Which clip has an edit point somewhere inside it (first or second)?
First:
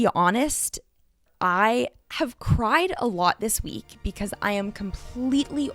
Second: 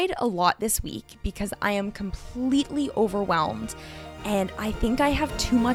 first